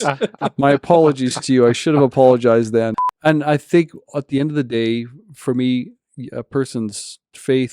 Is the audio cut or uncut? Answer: cut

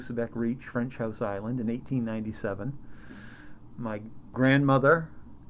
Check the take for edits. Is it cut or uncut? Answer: cut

